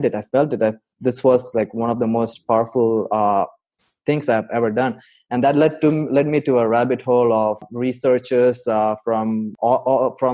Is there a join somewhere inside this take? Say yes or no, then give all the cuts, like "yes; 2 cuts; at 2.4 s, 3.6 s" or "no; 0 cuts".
yes; 2 cuts; at 7.7 s, 9.5 s